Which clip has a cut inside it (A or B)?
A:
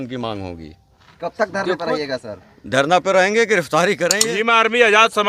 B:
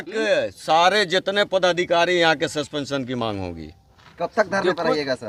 A